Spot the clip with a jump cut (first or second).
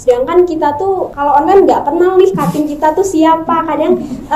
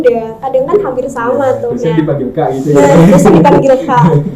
first